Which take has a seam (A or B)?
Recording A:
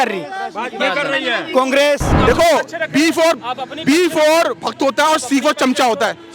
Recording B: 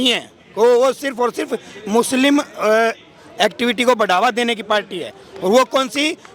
A